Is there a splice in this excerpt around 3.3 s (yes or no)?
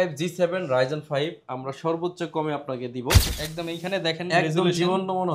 yes